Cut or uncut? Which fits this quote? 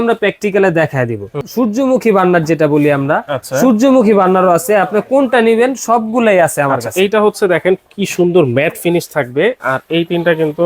cut